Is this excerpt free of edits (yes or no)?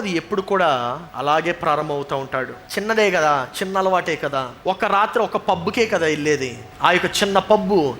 no